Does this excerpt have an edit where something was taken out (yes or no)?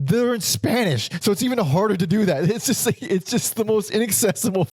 no